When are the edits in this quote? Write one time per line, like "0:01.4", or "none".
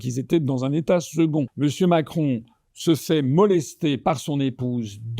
0:01.5